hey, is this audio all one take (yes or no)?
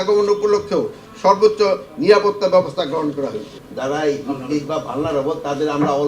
no